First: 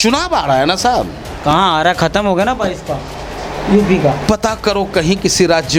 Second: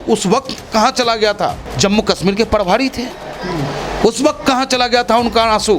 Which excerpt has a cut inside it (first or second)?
second